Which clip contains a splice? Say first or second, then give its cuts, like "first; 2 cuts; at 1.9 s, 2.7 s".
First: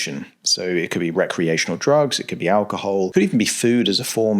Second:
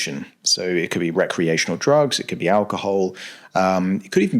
first; 1 cut; at 3.1 s